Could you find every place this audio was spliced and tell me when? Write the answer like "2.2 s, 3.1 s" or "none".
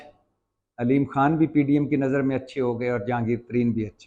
none